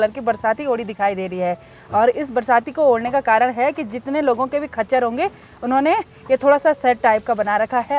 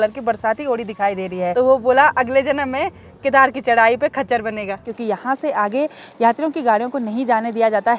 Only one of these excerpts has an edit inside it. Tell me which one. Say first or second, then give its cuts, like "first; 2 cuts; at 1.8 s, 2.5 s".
second; 2 cuts; at 1.5 s, 4.9 s